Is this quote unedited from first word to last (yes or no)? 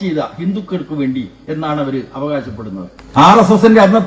no